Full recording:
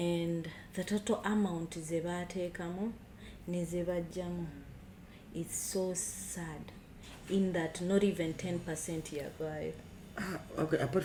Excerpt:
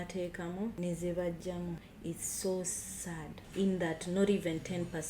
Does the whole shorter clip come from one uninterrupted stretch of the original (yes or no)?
no